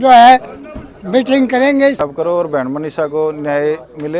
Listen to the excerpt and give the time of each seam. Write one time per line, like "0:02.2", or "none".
0:02.0

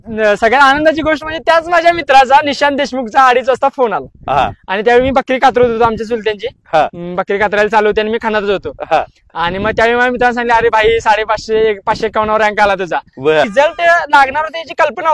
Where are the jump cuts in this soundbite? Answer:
0:13.5

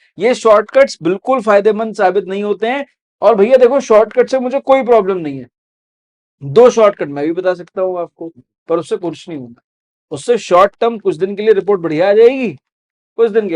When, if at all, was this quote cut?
0:03.0

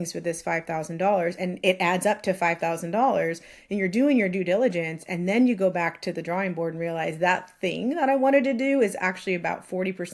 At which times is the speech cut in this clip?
none

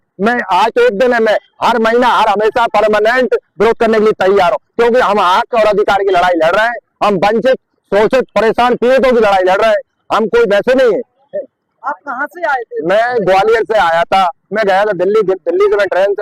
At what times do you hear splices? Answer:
none

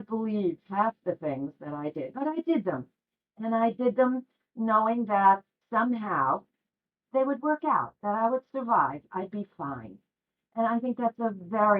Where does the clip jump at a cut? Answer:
0:07.0

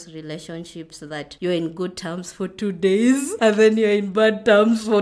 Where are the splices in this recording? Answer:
0:01.3
0:03.3

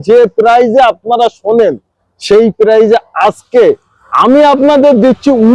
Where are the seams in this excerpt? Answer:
none

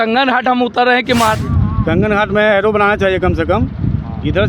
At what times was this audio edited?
0:01.4

